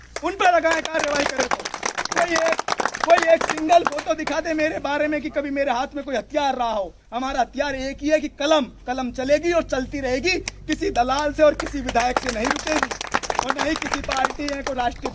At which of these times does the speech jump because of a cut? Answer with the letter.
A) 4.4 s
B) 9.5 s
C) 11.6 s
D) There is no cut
D